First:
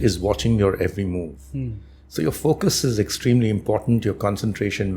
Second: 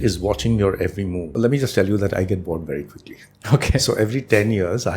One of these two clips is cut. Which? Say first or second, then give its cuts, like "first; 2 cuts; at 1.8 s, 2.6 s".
second; 1 cut; at 1.2 s